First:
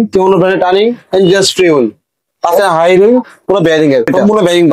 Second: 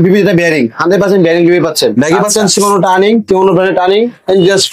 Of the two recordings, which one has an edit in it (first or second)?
second